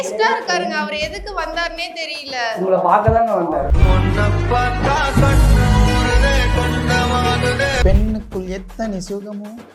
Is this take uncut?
no; 1 cut; at 7.8 s

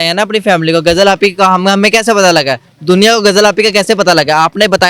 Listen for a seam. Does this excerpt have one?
no; 0 cuts

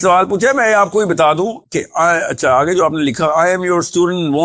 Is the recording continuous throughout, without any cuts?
yes; 0 cuts

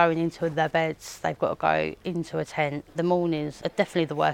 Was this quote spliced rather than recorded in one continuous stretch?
yes; 2 cuts; at 2.9 s, 3.5 s

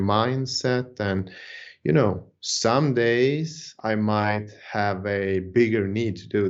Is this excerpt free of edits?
yes; 0 cuts

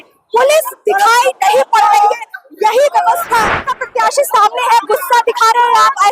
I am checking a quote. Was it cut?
yes; 1 cut; at 3.7 s

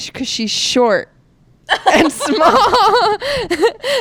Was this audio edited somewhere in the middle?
no; 0 cuts

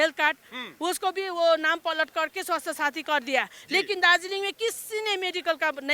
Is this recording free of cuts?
yes; 0 cuts

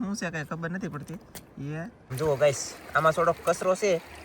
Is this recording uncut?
no; 1 cut; at 2.1 s

